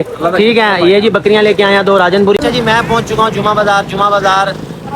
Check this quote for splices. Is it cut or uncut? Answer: cut